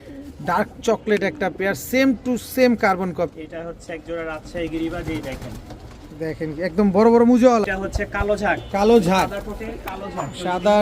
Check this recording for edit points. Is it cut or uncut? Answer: cut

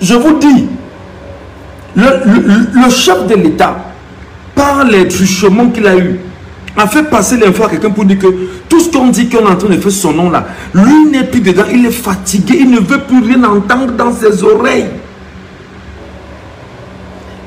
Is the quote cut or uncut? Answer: uncut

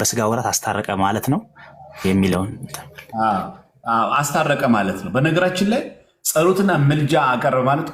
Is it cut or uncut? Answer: uncut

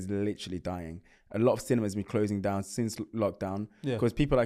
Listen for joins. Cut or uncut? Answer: uncut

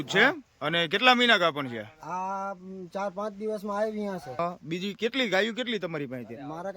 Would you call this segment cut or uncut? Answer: cut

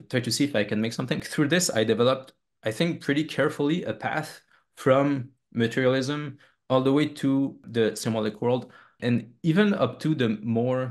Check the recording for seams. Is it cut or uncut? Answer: cut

